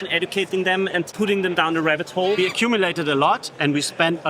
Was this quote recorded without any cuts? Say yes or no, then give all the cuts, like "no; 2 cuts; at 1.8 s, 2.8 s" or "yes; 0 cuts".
no; 2 cuts; at 1.1 s, 2.4 s